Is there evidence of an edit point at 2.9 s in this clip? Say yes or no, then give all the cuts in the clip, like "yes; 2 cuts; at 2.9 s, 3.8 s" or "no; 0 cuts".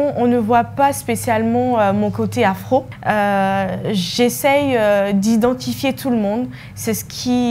yes; 1 cut; at 2.9 s